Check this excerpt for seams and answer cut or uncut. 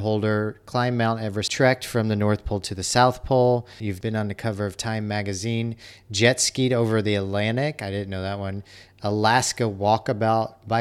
cut